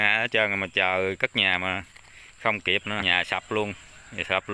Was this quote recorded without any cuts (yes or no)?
no